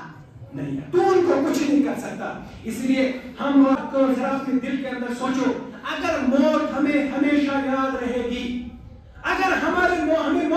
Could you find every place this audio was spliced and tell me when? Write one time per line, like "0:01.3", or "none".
0:03.8